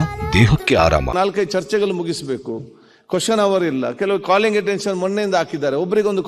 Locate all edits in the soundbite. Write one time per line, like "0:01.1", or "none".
0:01.1